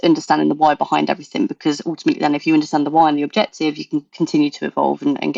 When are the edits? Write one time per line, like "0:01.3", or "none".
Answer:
none